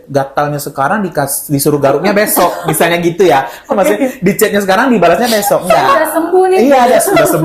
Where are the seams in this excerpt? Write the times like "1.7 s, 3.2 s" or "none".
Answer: none